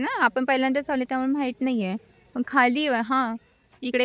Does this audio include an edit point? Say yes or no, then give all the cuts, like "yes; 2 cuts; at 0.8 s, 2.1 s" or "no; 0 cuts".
no; 0 cuts